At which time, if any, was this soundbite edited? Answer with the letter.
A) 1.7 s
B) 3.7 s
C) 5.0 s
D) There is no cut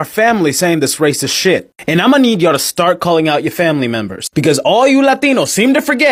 D